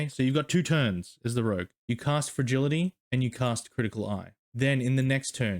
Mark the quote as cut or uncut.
cut